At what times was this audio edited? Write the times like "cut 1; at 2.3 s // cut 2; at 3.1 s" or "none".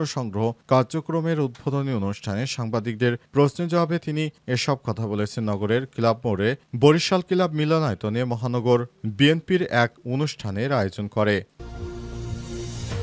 cut 1; at 11.5 s